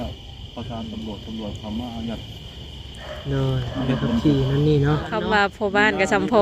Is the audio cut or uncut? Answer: cut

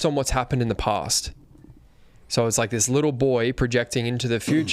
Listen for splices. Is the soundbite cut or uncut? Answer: uncut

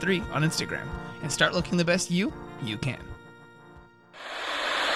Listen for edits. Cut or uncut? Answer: uncut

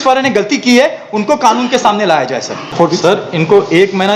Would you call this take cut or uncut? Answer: cut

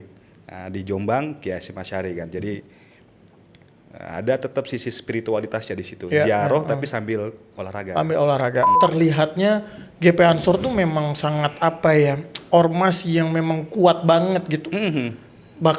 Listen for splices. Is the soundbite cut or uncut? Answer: cut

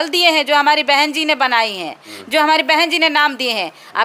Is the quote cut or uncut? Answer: uncut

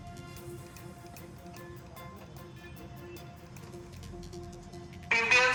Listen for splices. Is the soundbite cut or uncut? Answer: uncut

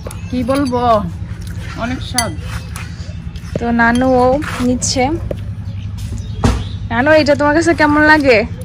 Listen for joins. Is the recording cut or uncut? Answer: uncut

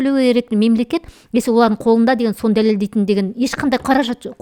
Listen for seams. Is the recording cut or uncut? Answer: uncut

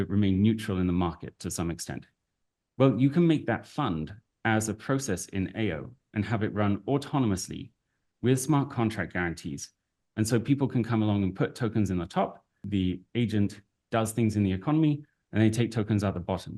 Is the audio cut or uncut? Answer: cut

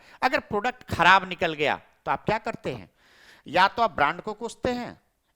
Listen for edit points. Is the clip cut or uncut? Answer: uncut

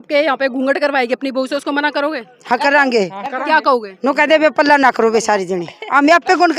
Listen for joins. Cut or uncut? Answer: uncut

